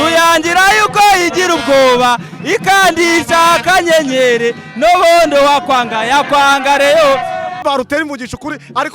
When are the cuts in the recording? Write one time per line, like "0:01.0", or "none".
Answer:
0:07.6